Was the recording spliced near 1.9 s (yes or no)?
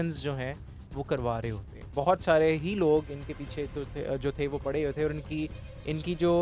yes